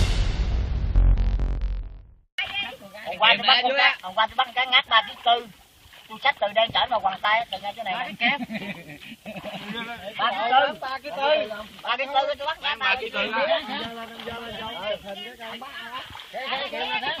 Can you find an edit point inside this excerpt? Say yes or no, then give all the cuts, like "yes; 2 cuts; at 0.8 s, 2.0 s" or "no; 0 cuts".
no; 0 cuts